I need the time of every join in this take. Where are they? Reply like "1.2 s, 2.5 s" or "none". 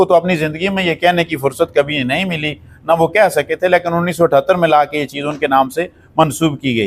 none